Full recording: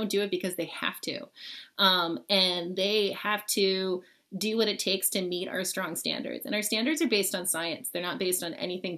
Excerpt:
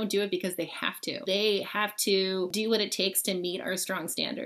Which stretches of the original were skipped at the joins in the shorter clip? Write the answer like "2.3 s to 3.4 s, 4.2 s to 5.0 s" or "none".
1.2 s to 2.7 s, 4.0 s to 4.4 s